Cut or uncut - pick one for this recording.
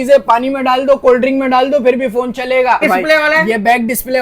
cut